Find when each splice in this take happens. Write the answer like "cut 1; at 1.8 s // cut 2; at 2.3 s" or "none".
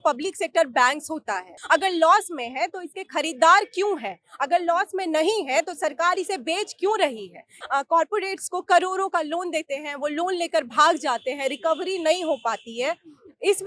cut 1; at 1.5 s // cut 2; at 7.4 s